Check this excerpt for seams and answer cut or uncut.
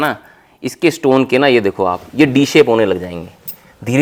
uncut